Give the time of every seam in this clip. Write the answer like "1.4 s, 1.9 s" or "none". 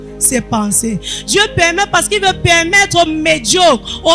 none